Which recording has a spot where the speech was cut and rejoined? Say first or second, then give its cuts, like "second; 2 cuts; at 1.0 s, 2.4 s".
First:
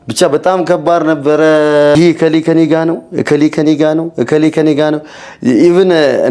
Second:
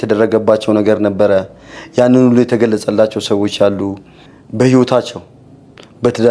first; 1 cut; at 1.9 s